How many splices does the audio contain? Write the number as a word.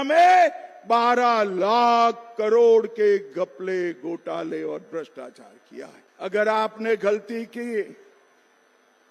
one